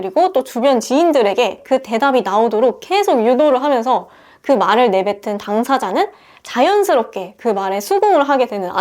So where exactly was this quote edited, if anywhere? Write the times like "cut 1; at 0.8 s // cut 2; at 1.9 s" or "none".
cut 1; at 1.6 s

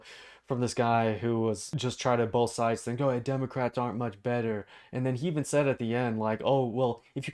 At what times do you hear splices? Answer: cut 1; at 1.7 s

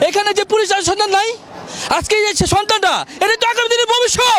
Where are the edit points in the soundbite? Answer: none

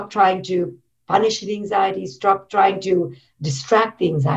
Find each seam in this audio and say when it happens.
cut 1; at 2.4 s

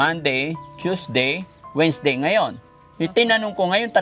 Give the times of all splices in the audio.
none

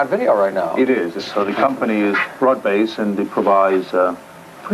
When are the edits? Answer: cut 1; at 3.0 s

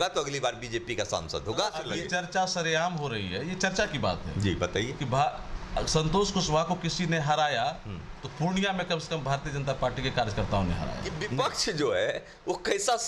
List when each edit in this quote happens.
cut 1; at 1.9 s // cut 2; at 11.1 s

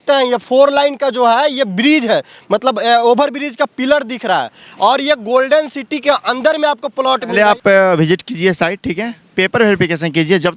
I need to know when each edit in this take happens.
cut 1; at 7.3 s

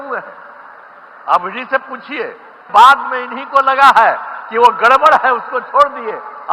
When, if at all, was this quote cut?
cut 1; at 2.6 s

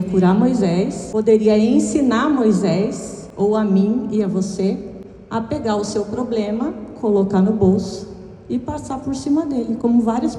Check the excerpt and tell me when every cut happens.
cut 1; at 1.0 s

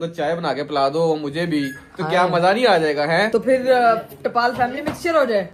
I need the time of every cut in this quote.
none

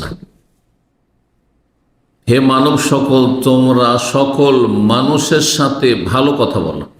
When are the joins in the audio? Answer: none

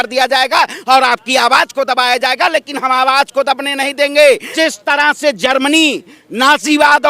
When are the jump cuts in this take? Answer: cut 1; at 4.5 s

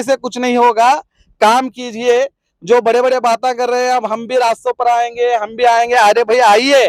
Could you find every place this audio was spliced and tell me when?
none

